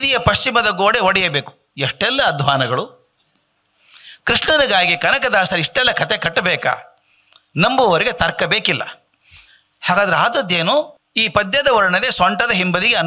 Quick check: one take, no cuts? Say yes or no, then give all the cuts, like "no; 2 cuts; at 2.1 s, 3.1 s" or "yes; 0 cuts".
no; 1 cut; at 11.0 s